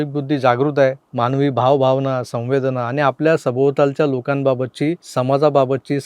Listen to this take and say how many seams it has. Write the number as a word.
two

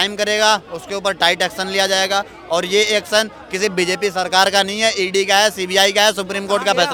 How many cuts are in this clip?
zero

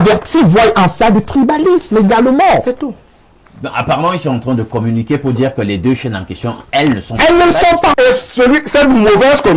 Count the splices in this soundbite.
one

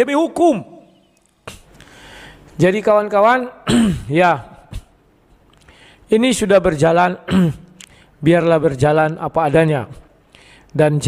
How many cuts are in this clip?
one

